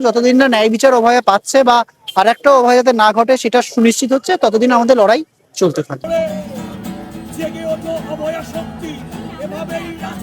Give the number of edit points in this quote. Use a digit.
1